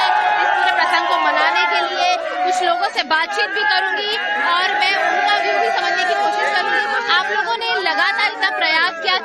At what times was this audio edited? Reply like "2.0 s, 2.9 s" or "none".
1.4 s